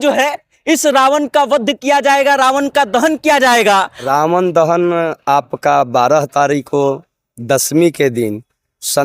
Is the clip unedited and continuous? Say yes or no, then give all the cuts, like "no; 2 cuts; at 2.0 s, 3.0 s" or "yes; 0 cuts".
no; 1 cut; at 4.1 s